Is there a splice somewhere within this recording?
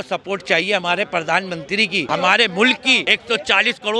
yes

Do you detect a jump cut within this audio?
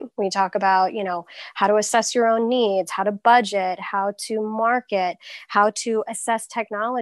no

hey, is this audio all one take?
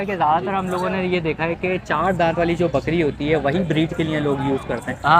yes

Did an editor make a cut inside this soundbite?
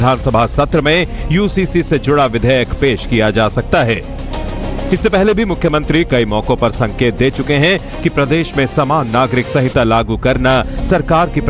no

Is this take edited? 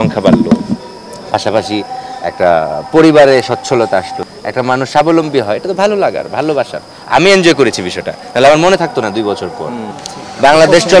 yes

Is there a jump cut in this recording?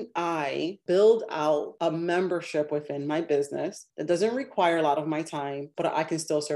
yes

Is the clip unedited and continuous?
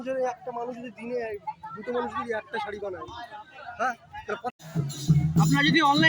no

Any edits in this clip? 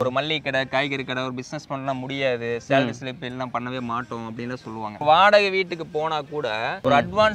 yes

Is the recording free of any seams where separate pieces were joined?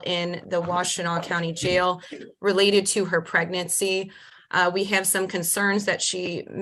yes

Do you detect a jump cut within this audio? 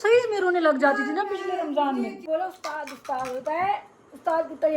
yes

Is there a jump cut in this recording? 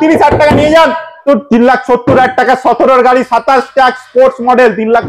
yes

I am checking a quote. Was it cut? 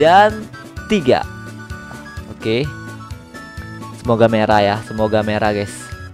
no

